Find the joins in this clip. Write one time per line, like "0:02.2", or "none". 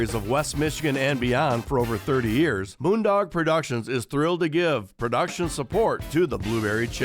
0:02.7